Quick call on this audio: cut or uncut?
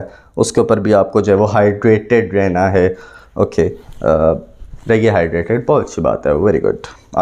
uncut